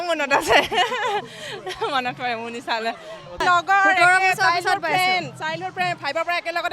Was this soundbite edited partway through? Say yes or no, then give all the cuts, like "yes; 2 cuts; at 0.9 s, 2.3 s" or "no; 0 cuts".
yes; 1 cut; at 3.4 s